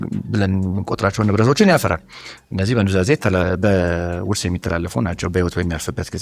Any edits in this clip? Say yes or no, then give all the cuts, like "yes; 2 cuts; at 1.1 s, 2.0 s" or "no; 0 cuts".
no; 0 cuts